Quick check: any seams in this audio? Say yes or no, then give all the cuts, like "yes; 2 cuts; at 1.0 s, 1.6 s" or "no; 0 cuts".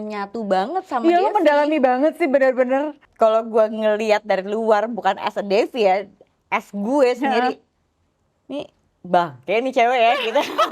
yes; 1 cut; at 3.0 s